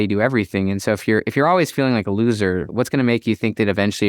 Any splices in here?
yes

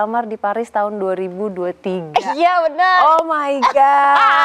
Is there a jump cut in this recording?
no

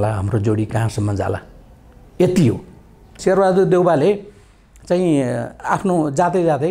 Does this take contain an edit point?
yes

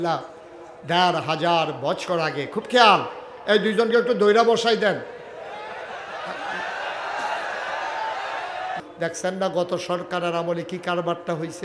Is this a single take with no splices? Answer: no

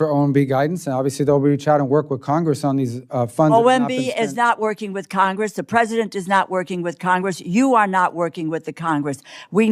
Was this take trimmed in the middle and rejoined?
no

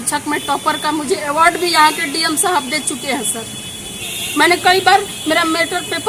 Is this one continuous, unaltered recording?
yes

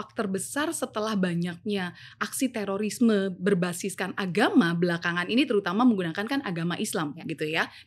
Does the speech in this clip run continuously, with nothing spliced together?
yes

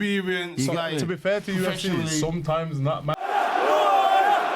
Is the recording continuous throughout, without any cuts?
no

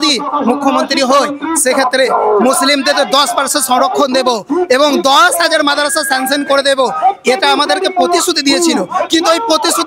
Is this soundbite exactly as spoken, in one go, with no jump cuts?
yes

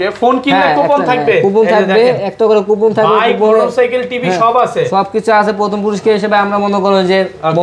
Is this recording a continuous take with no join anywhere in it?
yes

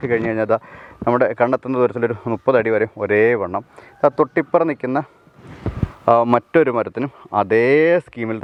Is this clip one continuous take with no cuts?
yes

